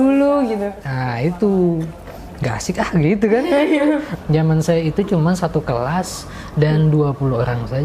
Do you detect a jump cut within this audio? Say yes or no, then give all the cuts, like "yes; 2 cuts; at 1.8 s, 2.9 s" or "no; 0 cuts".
yes; 1 cut; at 4.1 s